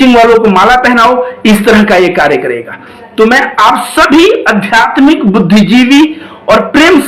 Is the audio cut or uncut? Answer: uncut